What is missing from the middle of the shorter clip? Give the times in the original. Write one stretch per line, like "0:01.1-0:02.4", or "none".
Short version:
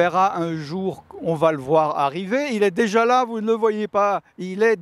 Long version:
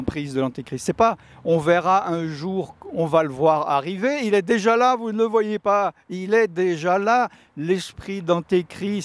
none